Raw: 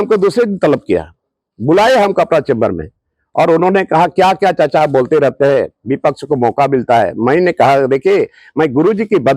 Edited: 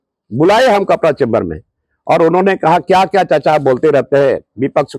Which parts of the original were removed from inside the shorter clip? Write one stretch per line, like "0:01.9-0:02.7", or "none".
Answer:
none